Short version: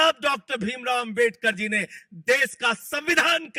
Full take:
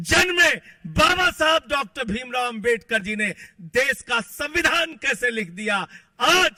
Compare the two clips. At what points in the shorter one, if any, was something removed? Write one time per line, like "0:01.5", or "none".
none